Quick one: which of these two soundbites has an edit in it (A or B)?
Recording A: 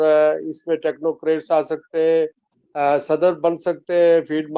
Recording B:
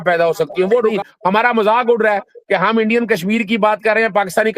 B